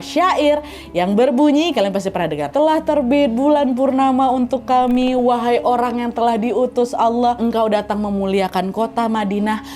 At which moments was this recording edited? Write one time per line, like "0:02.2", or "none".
0:02.5
0:07.4

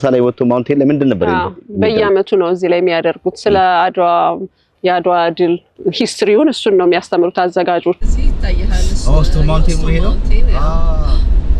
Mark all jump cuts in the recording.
0:04.7
0:05.7
0:08.0

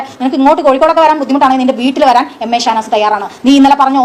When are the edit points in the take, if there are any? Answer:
none

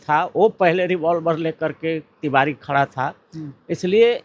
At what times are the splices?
none

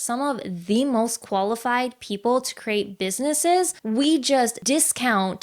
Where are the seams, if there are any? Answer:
0:03.8
0:04.6

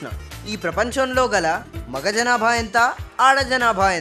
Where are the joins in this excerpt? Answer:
none

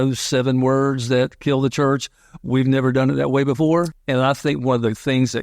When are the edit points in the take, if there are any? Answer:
0:03.9

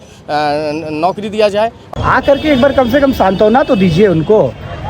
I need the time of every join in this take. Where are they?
0:01.8

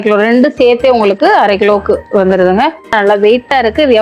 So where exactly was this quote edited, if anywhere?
0:03.0

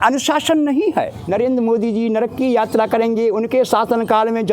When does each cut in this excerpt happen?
0:01.2

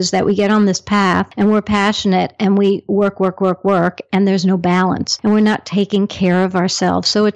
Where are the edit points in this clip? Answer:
0:01.3
0:05.1

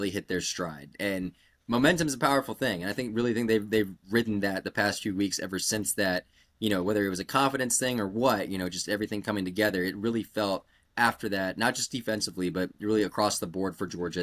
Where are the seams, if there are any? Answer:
none

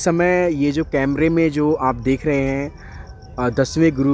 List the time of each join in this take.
none

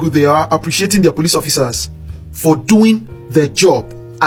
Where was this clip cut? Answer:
none

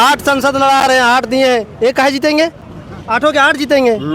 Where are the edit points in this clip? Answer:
none

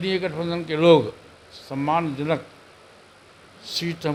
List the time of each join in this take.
none

